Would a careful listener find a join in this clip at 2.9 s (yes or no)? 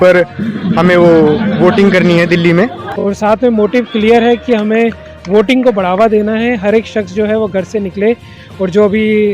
yes